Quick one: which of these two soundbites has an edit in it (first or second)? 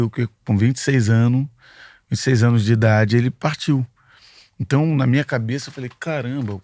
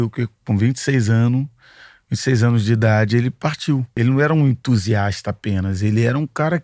second